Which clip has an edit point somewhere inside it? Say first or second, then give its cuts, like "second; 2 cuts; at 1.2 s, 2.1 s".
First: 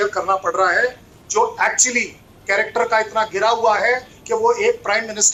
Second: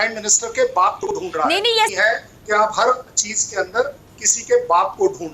second; 1 cut; at 1.9 s